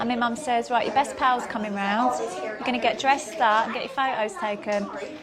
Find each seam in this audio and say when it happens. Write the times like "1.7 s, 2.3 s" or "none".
3.7 s